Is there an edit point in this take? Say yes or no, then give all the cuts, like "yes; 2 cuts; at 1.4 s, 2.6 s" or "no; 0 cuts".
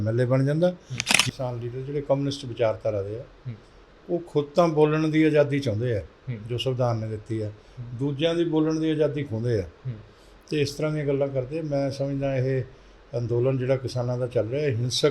yes; 1 cut; at 1.2 s